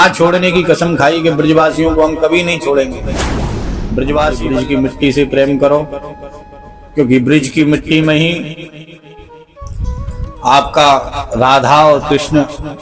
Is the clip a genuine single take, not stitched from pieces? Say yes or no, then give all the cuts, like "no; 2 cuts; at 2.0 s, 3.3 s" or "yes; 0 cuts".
no; 1 cut; at 4.4 s